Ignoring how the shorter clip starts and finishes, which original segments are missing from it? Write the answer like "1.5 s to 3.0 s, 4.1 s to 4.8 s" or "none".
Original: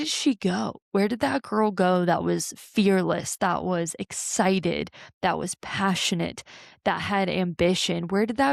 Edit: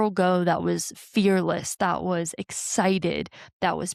none